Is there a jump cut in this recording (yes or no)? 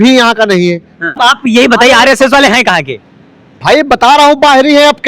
yes